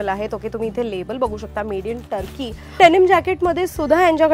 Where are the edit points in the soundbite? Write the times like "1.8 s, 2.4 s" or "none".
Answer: 2.8 s